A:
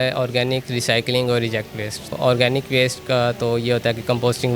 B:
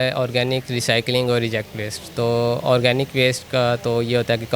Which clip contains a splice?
A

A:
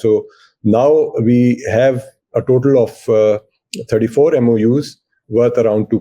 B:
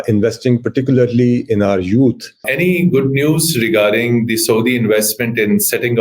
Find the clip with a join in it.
B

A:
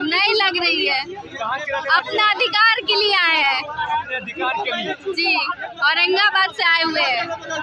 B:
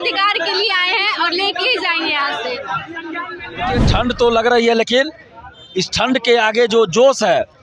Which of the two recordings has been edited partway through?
B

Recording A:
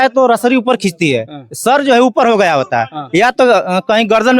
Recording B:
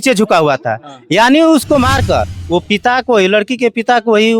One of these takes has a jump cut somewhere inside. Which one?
B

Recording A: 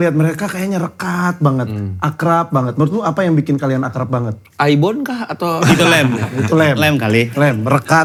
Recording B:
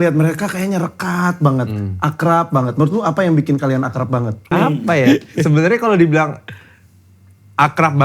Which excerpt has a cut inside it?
B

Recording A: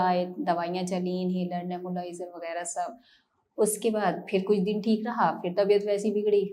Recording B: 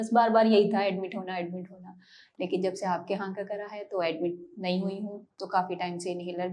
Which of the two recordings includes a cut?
B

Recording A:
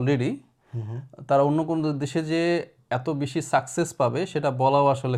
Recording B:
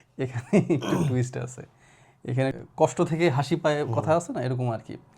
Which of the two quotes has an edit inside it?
B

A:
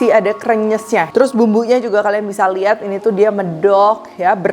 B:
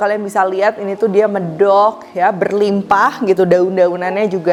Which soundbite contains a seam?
A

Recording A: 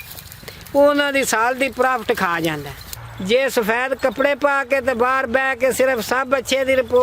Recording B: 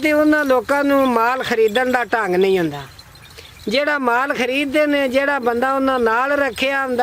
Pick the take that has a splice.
A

